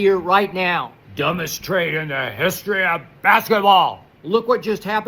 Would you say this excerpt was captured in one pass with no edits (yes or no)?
no